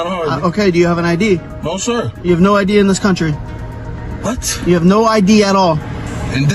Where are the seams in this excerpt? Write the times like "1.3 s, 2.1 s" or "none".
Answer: none